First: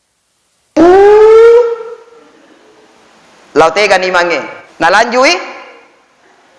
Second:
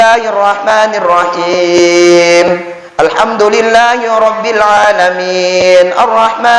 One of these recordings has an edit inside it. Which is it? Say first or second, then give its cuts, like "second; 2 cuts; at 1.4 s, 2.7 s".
first; 1 cut; at 4.6 s